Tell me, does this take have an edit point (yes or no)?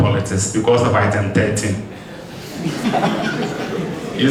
no